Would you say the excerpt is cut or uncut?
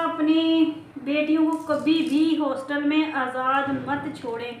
uncut